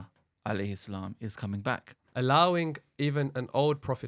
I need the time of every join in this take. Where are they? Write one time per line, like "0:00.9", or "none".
0:01.9